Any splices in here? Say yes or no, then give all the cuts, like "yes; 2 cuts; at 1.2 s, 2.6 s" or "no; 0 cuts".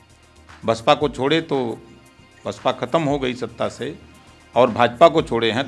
no; 0 cuts